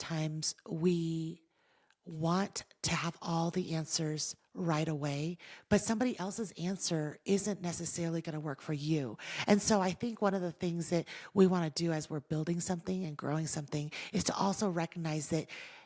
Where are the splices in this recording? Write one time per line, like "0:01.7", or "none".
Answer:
none